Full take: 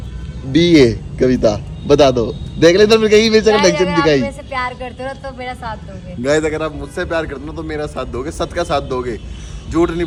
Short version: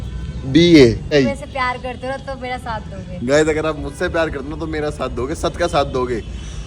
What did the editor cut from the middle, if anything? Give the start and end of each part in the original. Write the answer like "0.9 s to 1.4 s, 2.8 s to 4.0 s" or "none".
1.1 s to 4.1 s